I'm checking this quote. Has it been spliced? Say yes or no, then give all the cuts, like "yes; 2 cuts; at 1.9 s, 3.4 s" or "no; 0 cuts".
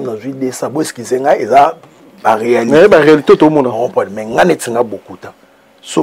no; 0 cuts